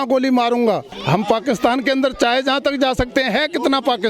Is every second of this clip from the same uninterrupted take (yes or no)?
no